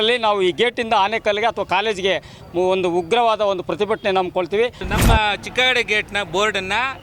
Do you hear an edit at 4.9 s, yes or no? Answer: yes